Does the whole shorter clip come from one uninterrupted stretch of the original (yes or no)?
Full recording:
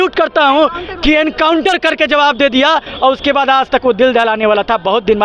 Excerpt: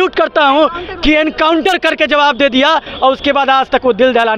yes